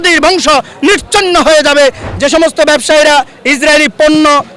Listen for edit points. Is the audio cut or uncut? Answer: cut